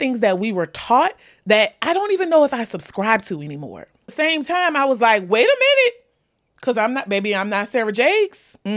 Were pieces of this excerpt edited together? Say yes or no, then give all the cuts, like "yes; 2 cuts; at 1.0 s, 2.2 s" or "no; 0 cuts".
yes; 1 cut; at 4.1 s